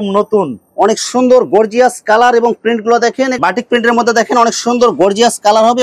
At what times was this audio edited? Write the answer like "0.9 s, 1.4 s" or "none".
3.3 s